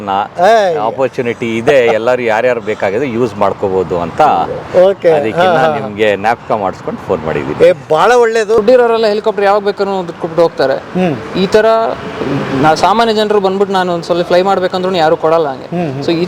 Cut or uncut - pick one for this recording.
cut